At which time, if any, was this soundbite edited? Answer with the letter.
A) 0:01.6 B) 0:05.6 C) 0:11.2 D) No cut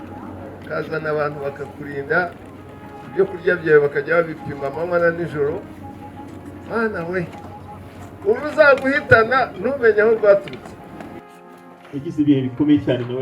C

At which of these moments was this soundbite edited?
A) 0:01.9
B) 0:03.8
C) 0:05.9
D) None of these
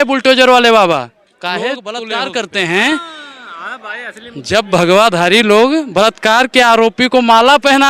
A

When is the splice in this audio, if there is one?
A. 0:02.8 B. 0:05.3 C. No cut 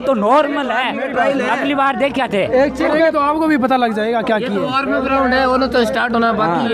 C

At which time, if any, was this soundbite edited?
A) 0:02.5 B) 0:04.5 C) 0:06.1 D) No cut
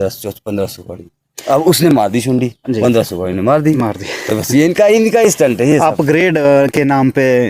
D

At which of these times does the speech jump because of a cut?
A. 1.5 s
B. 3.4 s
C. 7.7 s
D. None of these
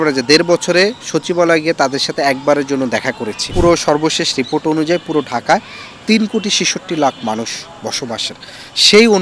B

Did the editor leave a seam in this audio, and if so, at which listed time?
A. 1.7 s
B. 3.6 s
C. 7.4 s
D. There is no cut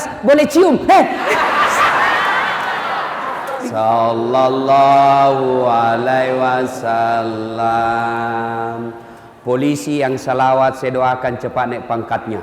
B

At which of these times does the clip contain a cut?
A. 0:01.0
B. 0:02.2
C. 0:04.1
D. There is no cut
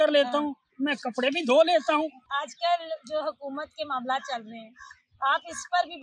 B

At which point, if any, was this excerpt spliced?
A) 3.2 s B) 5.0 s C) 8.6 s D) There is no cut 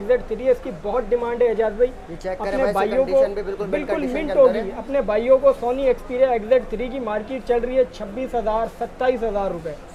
D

